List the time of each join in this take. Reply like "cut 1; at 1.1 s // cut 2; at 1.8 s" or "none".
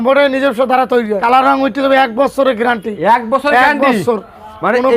cut 1; at 1.2 s